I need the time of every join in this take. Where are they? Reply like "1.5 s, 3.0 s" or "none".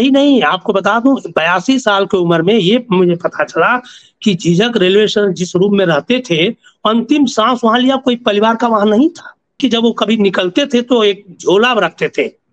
9.6 s

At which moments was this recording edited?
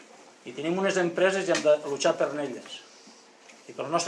2.0 s

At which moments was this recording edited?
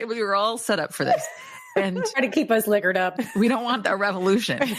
2.1 s, 3.1 s

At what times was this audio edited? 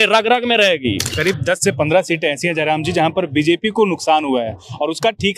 1.1 s

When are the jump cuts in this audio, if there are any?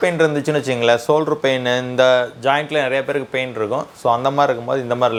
none

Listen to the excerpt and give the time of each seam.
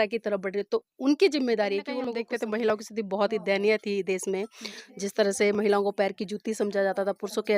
2.2 s

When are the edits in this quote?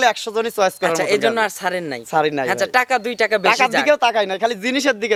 none

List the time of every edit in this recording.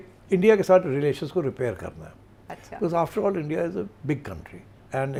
none

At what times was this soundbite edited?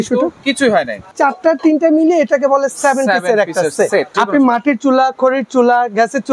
1.1 s, 4.1 s

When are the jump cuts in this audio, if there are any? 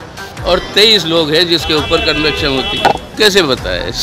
3.1 s

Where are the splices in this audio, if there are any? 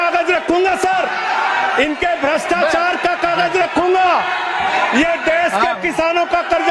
none

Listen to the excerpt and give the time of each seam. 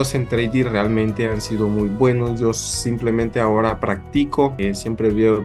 none

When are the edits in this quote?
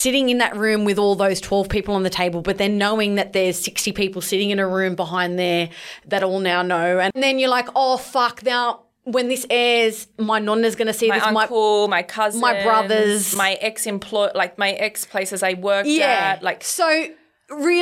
7.1 s

